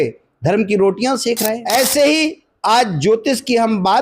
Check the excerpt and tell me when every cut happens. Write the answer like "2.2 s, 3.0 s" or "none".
1.6 s